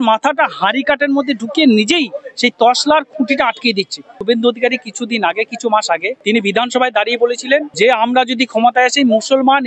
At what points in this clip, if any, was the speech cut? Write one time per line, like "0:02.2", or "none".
0:04.1
0:06.1
0:07.7